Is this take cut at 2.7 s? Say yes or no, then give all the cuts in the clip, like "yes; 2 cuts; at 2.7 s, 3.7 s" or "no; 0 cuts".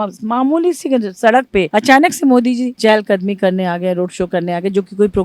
yes; 2 cuts; at 1.7 s, 2.7 s